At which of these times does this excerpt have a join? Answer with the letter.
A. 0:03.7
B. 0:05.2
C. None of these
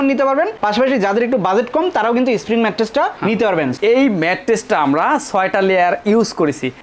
A